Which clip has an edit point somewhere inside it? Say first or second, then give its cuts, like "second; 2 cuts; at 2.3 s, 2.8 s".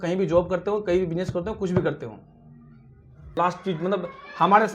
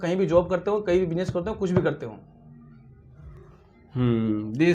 first; 1 cut; at 3.3 s